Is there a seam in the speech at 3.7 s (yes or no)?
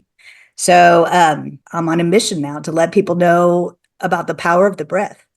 no